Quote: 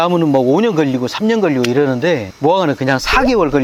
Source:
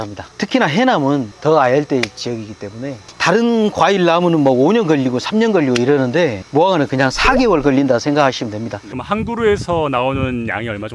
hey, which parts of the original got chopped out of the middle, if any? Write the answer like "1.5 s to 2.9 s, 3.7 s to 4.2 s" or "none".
none